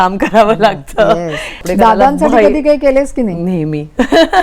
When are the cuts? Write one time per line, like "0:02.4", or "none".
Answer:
0:01.6